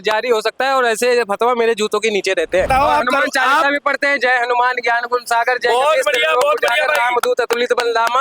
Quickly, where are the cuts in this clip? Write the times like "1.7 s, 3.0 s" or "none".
2.7 s